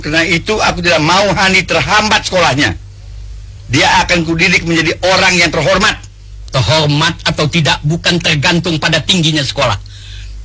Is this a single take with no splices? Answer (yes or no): yes